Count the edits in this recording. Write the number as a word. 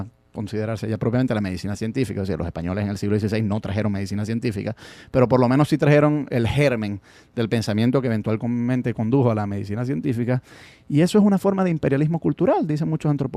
one